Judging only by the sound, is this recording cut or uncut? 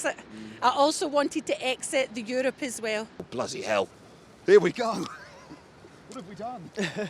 cut